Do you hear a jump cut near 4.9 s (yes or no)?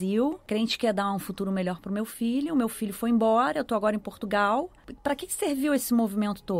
yes